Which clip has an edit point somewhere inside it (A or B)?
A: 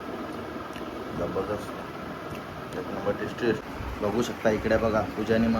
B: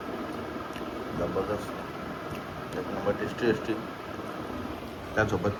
A